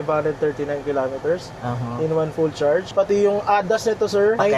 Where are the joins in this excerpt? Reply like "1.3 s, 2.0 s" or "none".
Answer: 2.9 s